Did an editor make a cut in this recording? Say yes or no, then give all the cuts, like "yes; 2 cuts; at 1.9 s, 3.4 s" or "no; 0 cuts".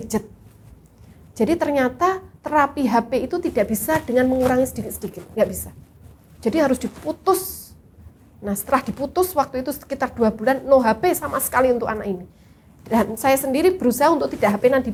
no; 0 cuts